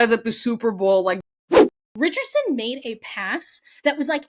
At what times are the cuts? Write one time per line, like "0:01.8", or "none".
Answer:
0:01.2
0:01.9